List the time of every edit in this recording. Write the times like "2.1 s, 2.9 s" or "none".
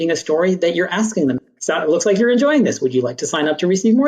1.4 s